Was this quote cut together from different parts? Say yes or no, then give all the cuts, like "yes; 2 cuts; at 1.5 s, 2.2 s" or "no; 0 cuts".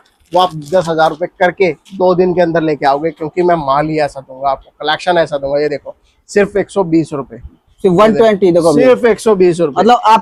no; 0 cuts